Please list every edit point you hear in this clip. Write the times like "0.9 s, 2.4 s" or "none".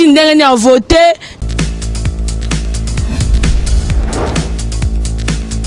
1.3 s